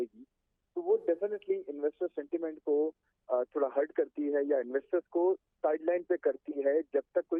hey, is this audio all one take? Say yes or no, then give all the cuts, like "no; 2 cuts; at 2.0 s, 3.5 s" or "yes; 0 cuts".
yes; 0 cuts